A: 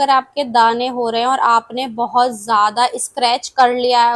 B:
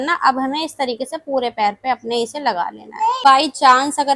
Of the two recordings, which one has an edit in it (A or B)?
B